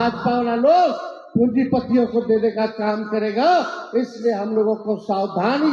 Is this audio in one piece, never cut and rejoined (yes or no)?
yes